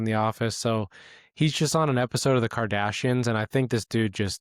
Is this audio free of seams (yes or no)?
yes